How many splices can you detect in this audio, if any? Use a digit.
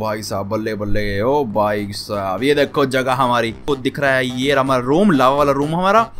1